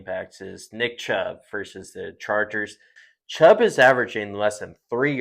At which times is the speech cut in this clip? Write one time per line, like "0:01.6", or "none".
0:03.0

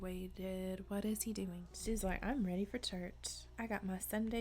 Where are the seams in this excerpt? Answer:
0:01.7

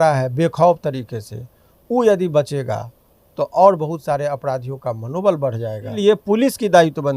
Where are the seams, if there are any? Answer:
0:05.9

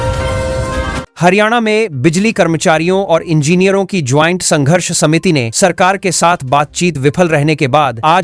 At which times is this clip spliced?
0:01.0

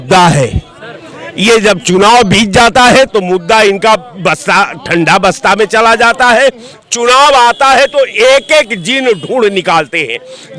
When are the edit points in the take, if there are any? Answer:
none

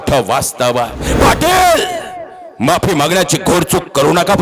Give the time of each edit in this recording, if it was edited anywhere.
0:01.1

